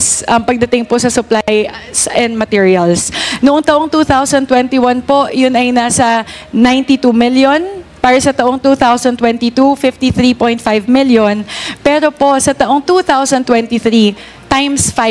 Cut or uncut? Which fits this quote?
uncut